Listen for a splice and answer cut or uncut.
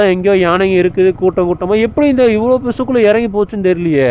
uncut